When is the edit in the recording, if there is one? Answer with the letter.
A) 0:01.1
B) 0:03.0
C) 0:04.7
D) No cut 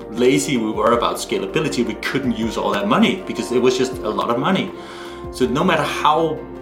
D